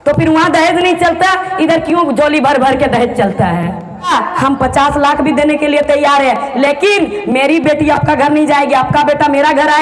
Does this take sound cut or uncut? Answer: cut